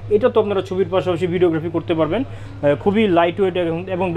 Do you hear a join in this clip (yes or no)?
no